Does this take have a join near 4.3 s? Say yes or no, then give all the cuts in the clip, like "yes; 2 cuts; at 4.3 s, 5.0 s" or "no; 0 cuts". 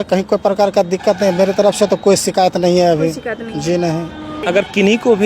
yes; 1 cut; at 4.3 s